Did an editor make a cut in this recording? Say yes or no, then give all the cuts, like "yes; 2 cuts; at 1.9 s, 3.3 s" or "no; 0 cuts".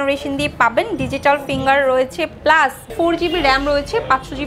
yes; 1 cut; at 2.9 s